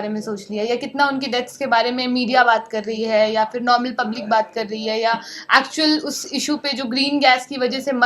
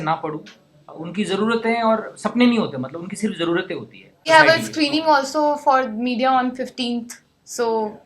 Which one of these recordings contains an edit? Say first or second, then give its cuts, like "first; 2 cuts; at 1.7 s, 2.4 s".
second; 1 cut; at 4.3 s